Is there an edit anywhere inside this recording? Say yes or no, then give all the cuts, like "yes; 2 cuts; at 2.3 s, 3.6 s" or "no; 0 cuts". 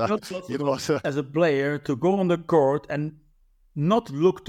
yes; 1 cut; at 1.1 s